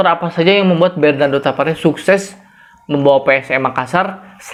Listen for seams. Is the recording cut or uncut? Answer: uncut